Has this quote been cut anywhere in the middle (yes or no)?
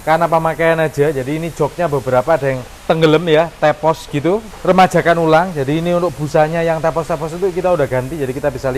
yes